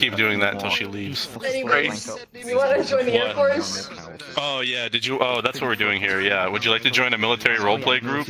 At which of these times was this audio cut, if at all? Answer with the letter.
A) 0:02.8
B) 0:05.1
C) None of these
C